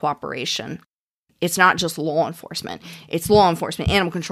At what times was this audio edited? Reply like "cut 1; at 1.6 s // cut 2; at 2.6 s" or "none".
cut 1; at 1.1 s